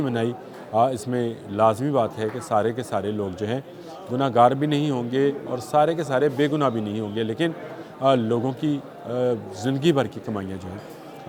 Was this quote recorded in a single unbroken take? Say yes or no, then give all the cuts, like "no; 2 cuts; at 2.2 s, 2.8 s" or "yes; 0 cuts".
yes; 0 cuts